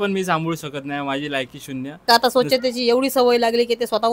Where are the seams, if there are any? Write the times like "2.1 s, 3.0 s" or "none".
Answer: 2.0 s